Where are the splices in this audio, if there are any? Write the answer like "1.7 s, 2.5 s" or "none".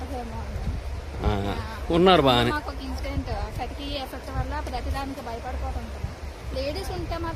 none